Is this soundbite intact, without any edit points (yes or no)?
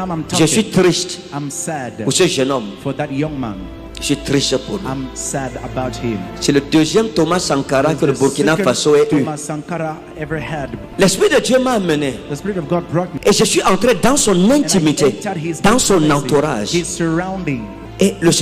yes